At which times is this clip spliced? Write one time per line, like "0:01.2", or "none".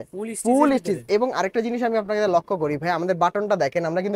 none

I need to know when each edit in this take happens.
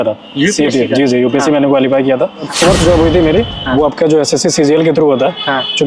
0:02.5

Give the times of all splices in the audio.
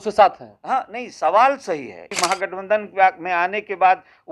0:02.1

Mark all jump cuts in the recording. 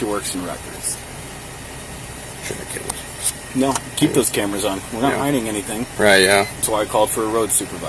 none

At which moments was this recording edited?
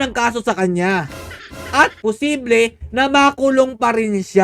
0:02.0

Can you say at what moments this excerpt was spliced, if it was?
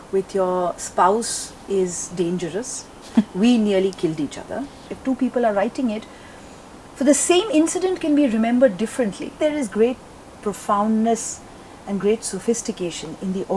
0:04.9
0:09.3

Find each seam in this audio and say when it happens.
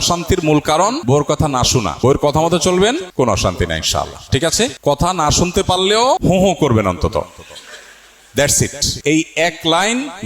0:01.0
0:01.9
0:03.1
0:04.8
0:06.2
0:08.9

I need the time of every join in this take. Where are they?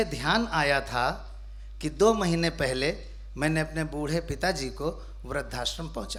none

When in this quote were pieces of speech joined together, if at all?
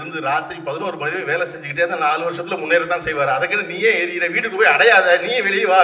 none

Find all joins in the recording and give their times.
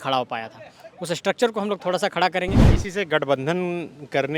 0:02.7

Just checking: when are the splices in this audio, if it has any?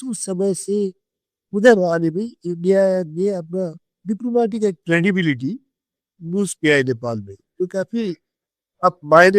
none

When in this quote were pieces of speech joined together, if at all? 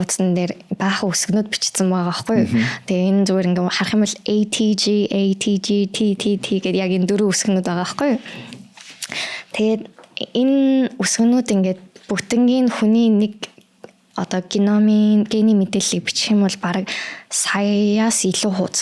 none

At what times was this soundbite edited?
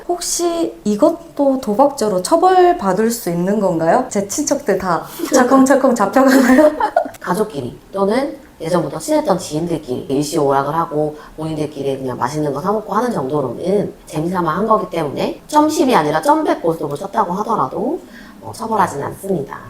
0:07.1
0:10.1

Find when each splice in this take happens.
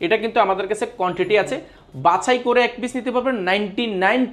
none

